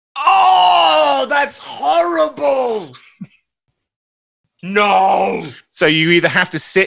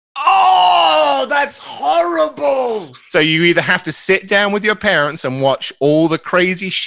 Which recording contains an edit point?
second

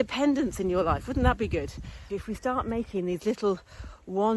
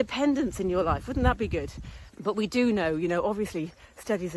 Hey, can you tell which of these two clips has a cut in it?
first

